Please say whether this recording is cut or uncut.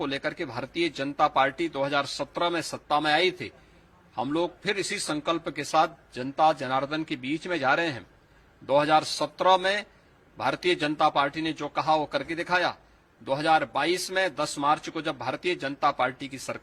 uncut